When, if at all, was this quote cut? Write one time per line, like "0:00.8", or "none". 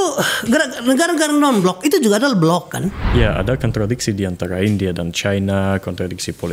0:03.0